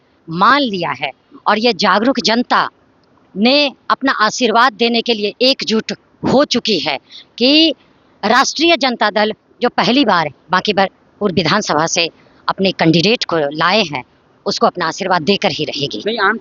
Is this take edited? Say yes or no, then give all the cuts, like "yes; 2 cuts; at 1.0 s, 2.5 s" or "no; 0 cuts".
no; 0 cuts